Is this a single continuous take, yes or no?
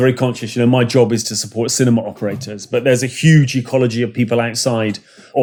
yes